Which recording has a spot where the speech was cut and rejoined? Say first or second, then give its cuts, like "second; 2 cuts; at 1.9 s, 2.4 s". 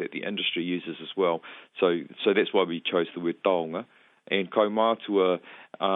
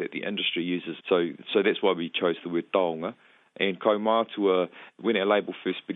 second; 2 cuts; at 0.9 s, 4.8 s